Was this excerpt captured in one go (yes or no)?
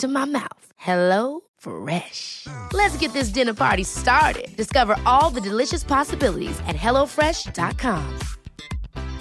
yes